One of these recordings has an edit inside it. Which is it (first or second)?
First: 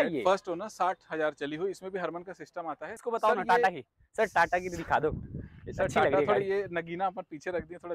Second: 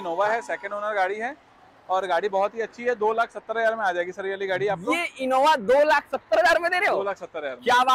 first